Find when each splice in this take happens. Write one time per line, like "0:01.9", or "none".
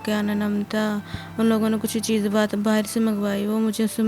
none

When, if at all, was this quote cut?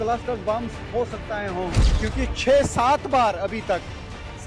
0:01.8

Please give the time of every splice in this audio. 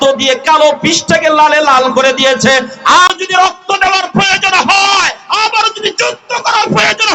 0:03.1

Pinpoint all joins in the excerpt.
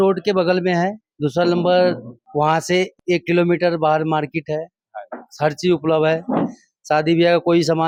none

